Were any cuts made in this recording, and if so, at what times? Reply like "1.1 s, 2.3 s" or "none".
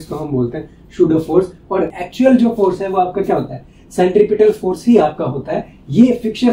2.0 s